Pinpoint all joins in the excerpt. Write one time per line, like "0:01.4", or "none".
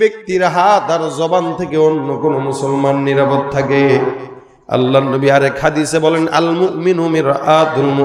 none